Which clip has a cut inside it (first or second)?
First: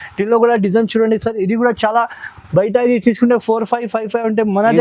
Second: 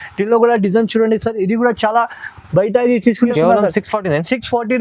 second